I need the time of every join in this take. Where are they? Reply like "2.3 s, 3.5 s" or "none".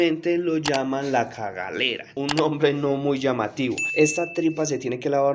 none